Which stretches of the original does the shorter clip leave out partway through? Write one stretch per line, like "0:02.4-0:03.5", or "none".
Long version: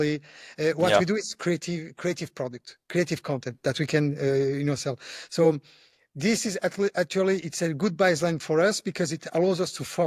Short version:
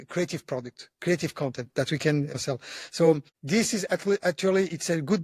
0:04.2-0:04.7
0:05.7-0:06.1